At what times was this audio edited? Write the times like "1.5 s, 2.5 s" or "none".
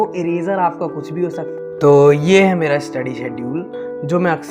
1.5 s